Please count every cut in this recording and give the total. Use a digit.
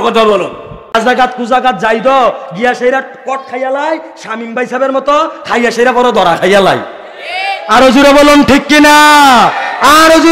1